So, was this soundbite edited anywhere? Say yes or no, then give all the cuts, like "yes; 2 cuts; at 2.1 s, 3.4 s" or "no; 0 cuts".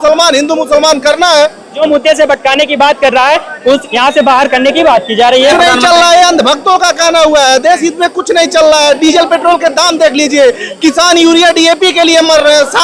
yes; 3 cuts; at 1.8 s, 3.9 s, 5.5 s